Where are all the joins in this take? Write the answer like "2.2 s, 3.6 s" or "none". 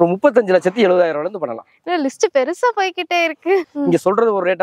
3.7 s